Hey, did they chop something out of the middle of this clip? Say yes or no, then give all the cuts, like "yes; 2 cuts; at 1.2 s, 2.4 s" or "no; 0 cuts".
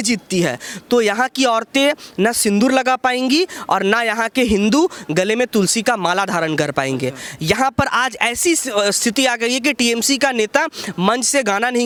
no; 0 cuts